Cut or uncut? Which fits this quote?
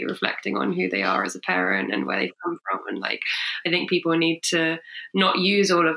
uncut